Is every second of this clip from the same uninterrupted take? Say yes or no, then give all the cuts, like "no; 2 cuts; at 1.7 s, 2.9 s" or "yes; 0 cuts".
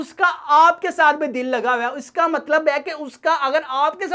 yes; 0 cuts